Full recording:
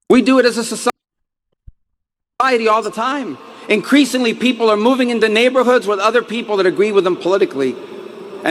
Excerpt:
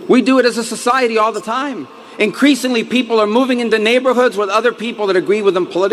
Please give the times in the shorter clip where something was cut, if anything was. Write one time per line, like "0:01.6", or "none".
0:00.9